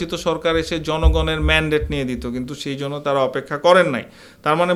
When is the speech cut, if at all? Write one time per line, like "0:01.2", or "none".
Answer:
none